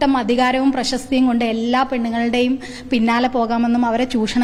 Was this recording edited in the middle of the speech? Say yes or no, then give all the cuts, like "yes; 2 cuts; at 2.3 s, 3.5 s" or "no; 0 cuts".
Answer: no; 0 cuts